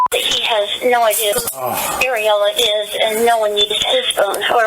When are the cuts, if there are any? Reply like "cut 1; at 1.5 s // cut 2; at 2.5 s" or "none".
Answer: cut 1; at 1.4 s